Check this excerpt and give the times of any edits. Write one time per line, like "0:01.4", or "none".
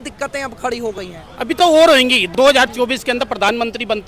0:02.2